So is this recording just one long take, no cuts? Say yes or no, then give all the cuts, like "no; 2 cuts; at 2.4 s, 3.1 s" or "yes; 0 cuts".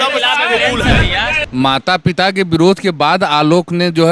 no; 1 cut; at 1.4 s